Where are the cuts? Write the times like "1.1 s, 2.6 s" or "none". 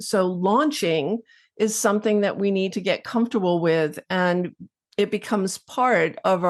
none